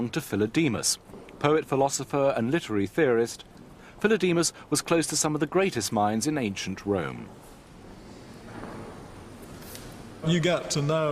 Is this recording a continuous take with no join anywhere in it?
yes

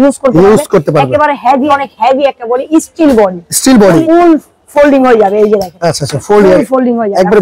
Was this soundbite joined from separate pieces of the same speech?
yes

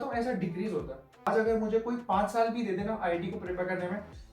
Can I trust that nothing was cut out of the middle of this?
no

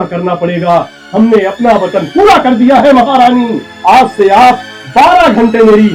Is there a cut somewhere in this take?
yes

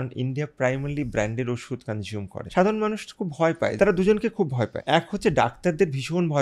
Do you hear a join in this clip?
yes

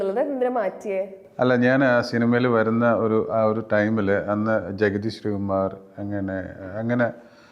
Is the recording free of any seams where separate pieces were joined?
yes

